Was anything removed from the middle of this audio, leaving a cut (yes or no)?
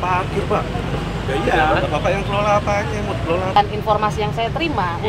yes